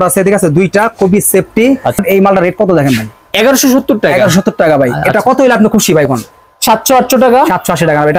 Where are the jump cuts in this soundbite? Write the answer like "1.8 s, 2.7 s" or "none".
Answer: 2.0 s